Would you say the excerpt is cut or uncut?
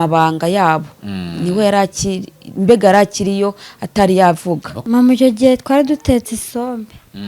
cut